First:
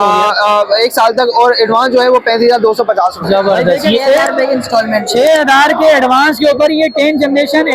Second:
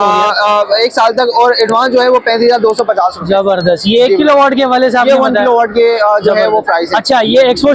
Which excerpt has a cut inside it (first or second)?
first